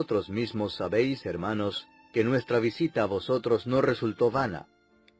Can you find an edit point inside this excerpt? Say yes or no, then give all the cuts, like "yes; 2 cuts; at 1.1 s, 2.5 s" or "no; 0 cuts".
no; 0 cuts